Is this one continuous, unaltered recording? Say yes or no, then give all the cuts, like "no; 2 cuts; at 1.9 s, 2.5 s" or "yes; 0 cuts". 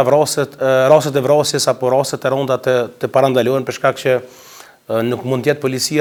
yes; 0 cuts